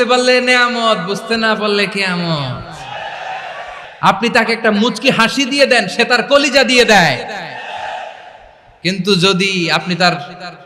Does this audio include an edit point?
yes; 1 cut; at 3.9 s

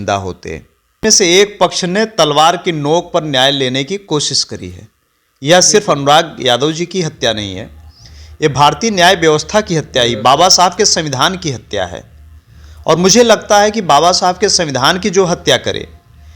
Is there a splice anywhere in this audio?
yes; 1 cut; at 1.0 s

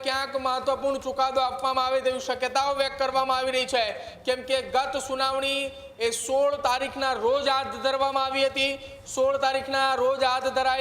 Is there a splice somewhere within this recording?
no; 0 cuts

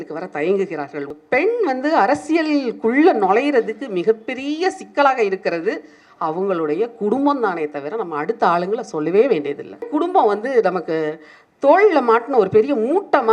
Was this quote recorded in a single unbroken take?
no; 2 cuts; at 1.1 s, 9.9 s

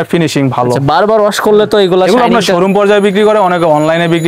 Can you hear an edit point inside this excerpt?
no; 0 cuts

